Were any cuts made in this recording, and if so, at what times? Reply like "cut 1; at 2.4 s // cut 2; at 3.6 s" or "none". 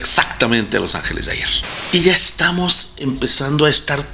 cut 1; at 1.9 s